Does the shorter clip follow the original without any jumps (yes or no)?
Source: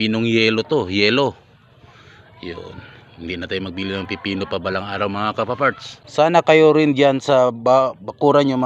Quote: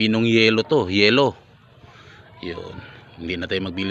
yes